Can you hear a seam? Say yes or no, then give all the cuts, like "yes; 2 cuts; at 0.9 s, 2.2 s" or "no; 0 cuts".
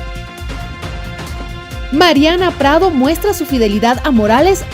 yes; 1 cut; at 0.9 s